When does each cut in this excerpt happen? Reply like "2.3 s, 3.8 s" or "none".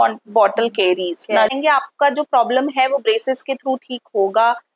1.6 s